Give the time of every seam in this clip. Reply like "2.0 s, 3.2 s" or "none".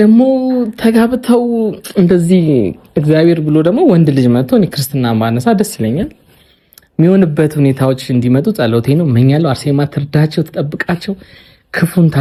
none